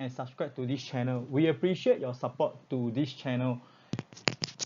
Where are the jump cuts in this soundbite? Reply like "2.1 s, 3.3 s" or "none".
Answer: 3.7 s